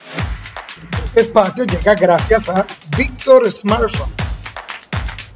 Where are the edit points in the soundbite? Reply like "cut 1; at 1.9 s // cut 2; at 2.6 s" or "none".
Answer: cut 1; at 1.2 s // cut 2; at 4.3 s